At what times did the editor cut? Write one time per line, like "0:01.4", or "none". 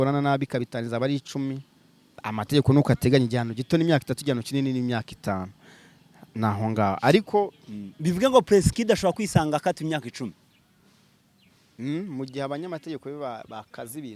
none